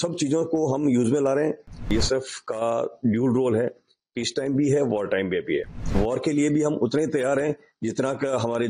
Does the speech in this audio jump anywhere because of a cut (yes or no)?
yes